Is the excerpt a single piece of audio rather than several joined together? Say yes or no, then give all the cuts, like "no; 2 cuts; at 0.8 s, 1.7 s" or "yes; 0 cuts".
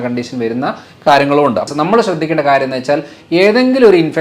no; 1 cut; at 1.7 s